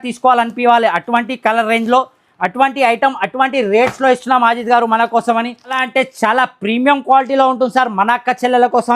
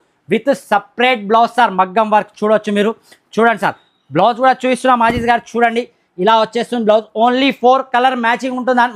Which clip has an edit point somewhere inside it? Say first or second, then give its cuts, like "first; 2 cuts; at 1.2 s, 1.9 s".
first; 1 cut; at 5.8 s